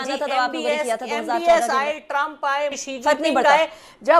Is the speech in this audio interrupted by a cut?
yes; 1 cut; at 2.8 s

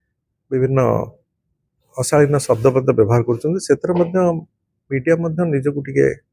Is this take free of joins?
yes; 0 cuts

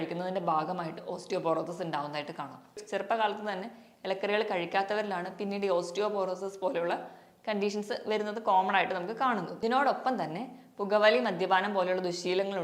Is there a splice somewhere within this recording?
yes; 2 cuts; at 2.8 s, 9.5 s

